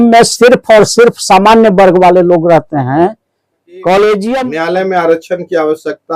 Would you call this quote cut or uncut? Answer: cut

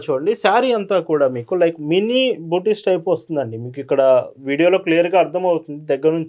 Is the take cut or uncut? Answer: uncut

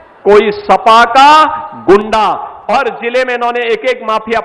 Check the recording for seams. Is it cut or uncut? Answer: cut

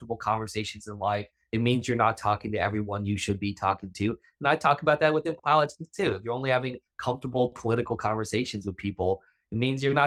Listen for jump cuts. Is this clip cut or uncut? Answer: uncut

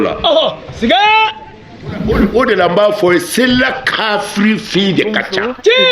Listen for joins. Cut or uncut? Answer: cut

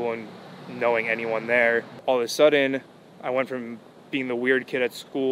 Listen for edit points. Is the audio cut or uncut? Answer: cut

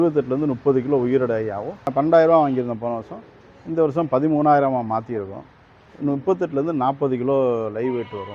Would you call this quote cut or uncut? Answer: cut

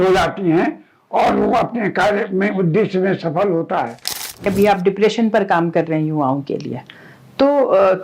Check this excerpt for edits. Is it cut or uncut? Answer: cut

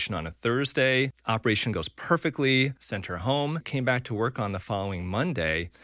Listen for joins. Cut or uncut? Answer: cut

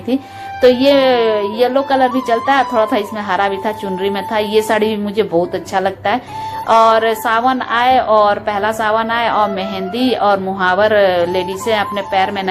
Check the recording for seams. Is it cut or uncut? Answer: uncut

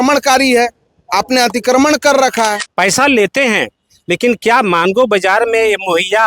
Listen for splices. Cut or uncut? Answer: cut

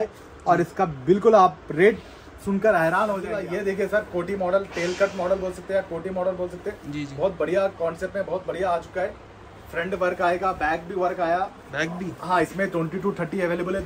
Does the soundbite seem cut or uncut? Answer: cut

